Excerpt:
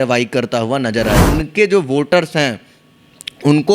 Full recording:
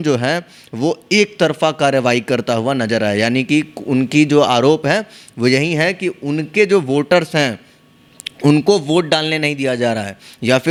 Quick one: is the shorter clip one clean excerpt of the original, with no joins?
no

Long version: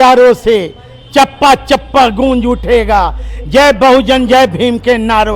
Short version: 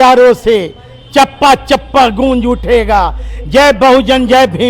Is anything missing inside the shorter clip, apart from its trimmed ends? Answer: no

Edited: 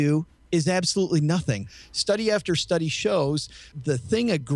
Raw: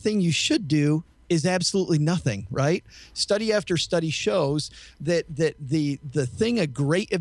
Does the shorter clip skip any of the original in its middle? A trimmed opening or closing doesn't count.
yes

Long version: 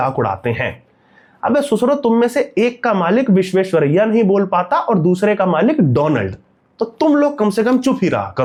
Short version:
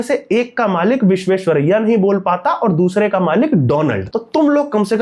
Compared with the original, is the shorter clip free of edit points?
no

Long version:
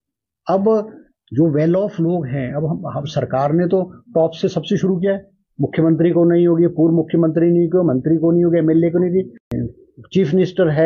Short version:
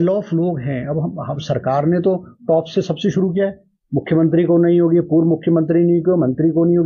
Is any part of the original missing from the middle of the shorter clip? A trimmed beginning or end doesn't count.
no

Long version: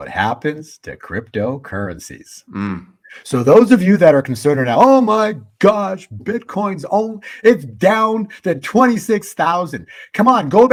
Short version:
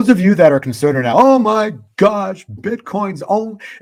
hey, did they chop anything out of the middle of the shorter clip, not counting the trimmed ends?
no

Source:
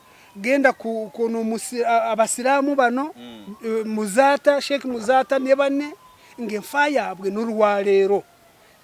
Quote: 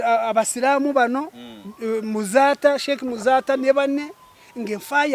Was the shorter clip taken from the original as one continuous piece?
yes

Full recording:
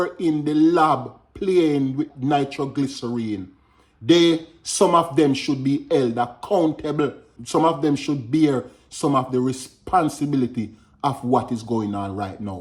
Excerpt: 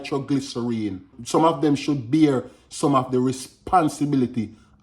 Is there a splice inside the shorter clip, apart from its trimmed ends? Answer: yes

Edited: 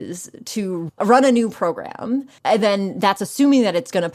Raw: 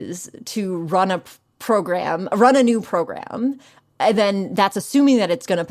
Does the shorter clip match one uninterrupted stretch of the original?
no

